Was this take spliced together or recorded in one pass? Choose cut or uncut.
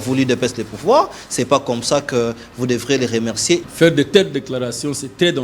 cut